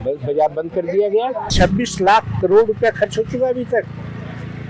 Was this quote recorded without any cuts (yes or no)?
no